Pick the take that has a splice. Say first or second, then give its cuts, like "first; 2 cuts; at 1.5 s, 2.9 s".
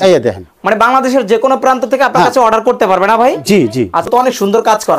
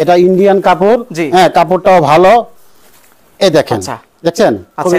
first; 1 cut; at 4.1 s